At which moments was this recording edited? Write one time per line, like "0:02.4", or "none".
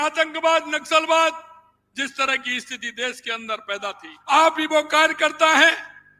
0:04.1